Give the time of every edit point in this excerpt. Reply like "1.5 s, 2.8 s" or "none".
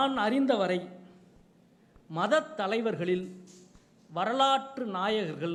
none

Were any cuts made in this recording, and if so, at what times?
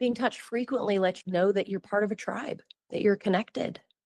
none

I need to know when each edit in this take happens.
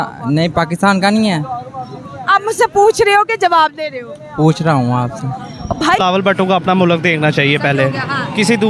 6.0 s

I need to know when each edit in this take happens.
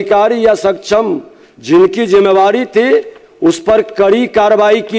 none

